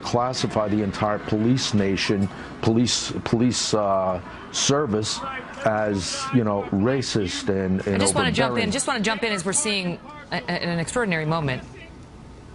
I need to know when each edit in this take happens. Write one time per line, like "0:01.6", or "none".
none